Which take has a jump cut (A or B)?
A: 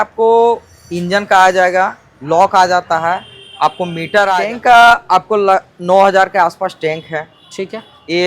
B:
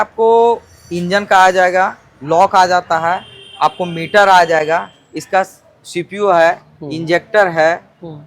A